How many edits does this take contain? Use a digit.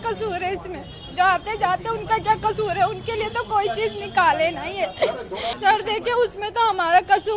1